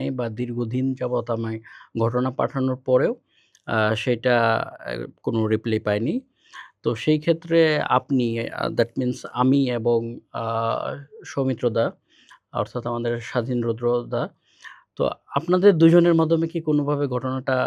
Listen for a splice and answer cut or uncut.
uncut